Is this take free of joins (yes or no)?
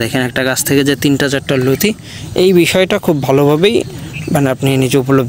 yes